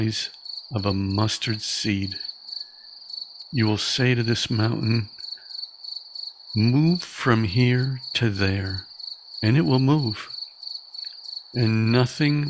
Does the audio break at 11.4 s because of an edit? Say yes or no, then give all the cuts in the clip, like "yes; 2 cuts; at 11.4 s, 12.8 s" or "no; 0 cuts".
no; 2 cuts; at 5.1 s, 6.5 s